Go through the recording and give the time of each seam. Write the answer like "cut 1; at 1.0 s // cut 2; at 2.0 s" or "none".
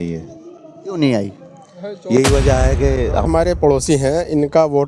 cut 1; at 3.2 s